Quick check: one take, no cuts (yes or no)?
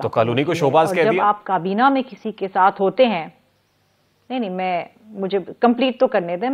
yes